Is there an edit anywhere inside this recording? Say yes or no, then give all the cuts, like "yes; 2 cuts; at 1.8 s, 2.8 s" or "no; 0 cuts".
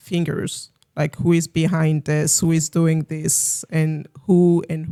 no; 0 cuts